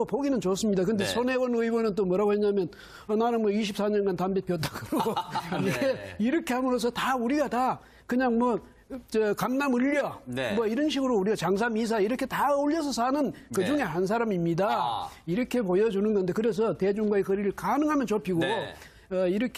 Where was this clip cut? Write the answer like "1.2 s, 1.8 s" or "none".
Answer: none